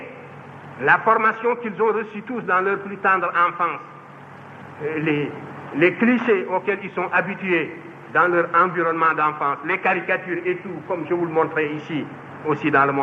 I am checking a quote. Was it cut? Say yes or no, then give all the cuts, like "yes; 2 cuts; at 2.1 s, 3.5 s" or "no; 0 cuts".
no; 0 cuts